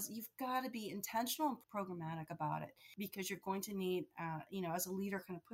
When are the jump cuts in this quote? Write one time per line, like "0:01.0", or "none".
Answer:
0:01.6
0:02.8